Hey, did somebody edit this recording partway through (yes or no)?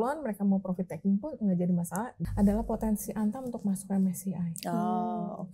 yes